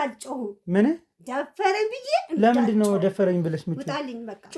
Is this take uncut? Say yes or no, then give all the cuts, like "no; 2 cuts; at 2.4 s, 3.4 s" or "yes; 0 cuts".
yes; 0 cuts